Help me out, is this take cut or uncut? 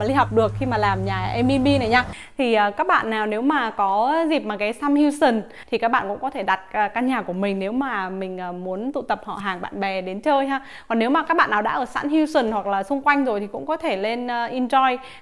cut